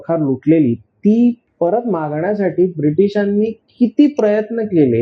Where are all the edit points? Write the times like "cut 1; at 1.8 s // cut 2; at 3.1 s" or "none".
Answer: cut 1; at 1.4 s